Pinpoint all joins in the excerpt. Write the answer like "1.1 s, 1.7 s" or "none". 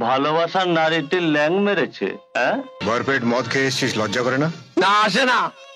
2.8 s